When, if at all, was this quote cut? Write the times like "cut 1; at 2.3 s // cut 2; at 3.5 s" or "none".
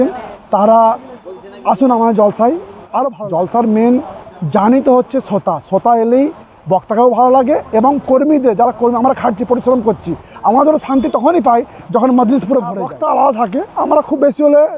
cut 1; at 3.2 s // cut 2; at 12.9 s